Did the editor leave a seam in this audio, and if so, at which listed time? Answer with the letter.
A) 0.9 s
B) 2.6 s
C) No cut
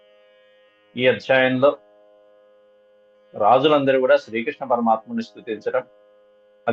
A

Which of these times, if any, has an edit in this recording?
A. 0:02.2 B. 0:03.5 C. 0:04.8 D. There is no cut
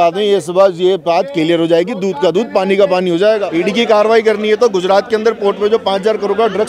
B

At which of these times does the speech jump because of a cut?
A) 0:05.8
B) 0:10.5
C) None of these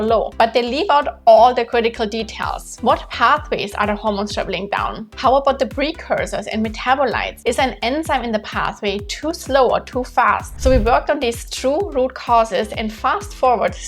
B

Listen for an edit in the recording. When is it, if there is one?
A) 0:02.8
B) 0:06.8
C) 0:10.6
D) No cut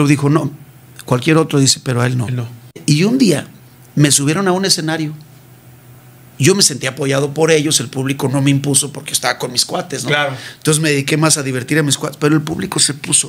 A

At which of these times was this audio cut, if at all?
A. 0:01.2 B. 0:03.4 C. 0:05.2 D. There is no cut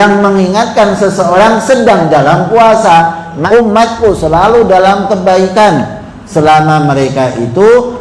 B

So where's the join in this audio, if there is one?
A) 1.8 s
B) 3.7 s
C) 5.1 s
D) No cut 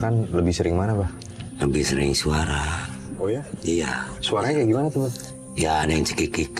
D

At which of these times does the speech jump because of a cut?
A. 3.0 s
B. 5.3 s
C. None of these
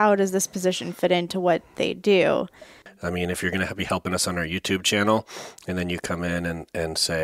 A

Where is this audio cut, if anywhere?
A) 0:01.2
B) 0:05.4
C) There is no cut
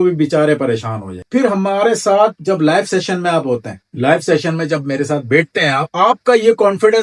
A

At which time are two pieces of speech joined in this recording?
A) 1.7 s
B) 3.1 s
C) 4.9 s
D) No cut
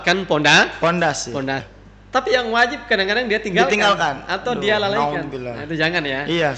A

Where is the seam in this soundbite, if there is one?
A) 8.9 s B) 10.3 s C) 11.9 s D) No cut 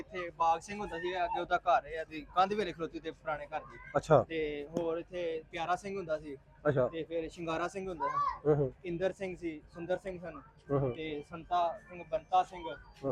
D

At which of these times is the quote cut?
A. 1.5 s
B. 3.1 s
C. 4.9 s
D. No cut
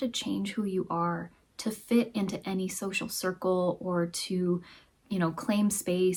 D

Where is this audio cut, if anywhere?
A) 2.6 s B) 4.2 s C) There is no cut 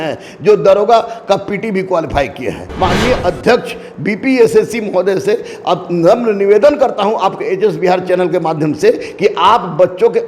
A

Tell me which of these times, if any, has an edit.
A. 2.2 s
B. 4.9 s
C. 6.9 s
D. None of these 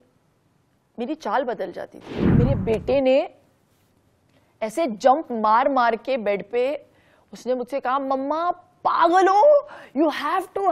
A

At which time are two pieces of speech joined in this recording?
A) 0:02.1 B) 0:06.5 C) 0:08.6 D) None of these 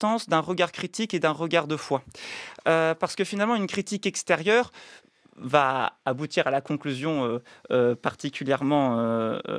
D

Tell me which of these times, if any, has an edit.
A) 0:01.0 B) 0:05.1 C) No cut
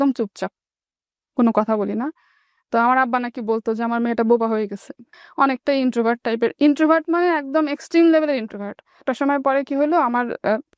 C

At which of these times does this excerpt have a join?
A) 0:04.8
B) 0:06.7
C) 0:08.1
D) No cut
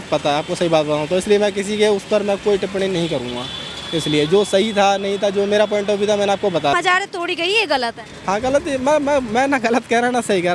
B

